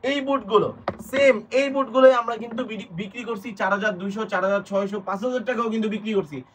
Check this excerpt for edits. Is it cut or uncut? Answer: uncut